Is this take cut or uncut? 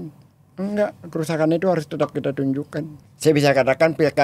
cut